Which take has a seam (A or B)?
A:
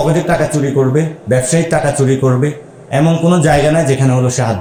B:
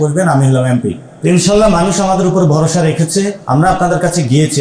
B